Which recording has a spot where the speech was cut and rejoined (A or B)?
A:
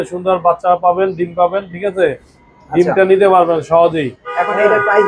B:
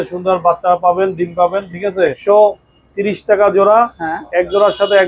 B